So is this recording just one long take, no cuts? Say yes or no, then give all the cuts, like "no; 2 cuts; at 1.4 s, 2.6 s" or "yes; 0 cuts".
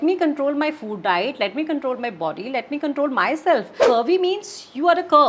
no; 1 cut; at 3.8 s